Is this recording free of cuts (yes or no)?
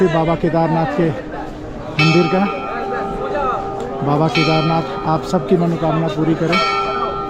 yes